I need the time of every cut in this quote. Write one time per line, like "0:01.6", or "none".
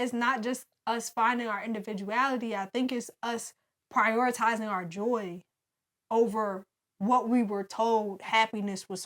none